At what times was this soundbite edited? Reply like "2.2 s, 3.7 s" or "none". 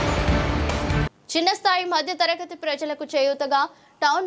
1.0 s